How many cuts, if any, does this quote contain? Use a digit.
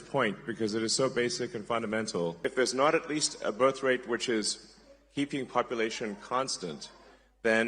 1